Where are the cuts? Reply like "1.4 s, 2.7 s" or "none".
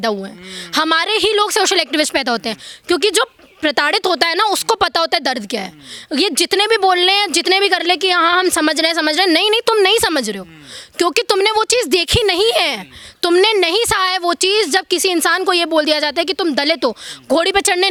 none